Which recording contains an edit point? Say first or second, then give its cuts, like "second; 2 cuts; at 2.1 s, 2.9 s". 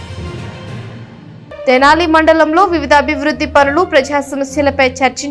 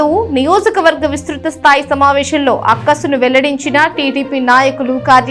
first; 1 cut; at 1.3 s